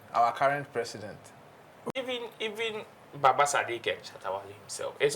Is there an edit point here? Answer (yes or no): yes